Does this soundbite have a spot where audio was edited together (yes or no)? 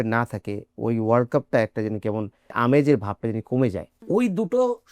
yes